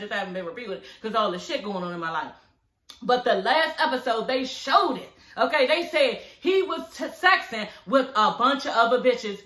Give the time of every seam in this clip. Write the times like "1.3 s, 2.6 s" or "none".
none